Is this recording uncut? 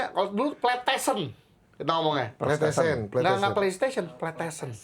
yes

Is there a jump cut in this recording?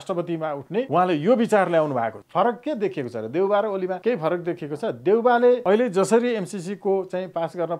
yes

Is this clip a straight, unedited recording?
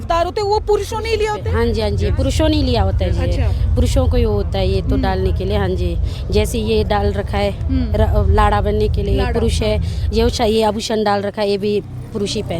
yes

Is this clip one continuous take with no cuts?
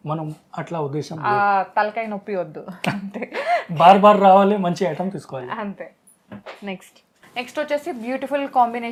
yes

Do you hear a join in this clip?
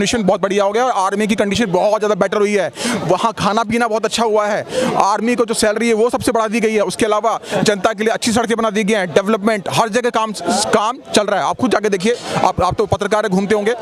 no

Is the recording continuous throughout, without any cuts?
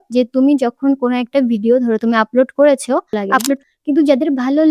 no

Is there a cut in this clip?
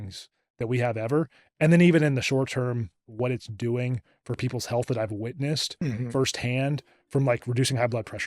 yes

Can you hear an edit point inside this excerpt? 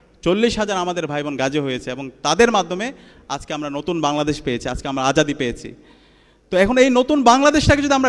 no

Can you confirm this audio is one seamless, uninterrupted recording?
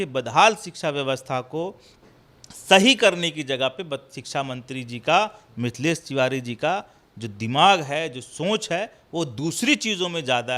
yes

